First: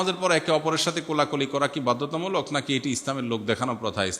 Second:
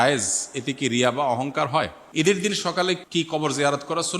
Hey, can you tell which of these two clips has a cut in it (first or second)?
second